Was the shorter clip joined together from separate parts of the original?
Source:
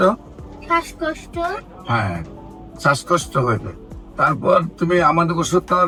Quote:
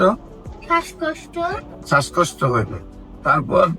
yes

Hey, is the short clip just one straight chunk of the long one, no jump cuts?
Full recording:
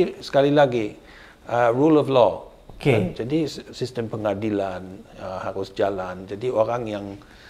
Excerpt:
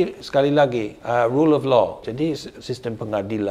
no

